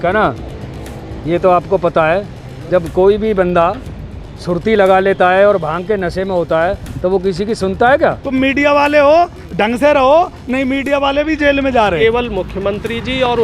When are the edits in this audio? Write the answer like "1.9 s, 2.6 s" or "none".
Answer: 8.2 s, 12.0 s